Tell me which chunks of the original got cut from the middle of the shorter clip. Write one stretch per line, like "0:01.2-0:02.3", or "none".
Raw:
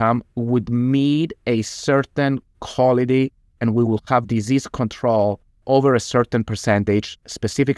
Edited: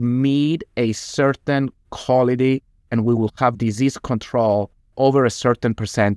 none